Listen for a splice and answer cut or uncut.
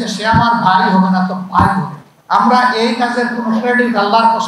cut